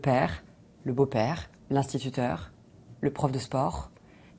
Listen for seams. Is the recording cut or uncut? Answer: cut